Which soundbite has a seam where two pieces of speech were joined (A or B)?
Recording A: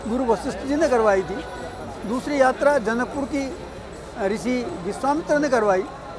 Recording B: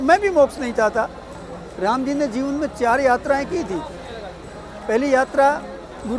B